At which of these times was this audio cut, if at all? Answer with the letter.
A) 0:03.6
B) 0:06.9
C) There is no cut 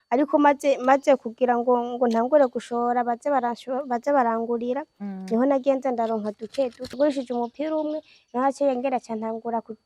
B